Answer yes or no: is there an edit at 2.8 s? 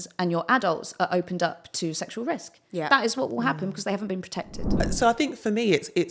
no